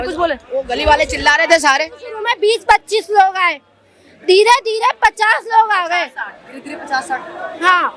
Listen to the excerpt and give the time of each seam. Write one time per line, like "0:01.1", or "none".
none